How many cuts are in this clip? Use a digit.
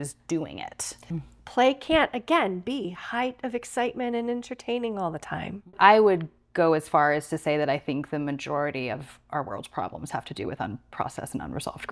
2